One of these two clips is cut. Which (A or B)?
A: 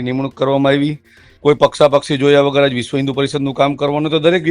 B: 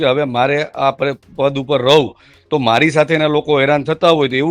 A